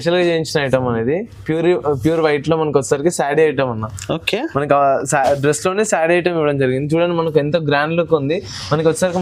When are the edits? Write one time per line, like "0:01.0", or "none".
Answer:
none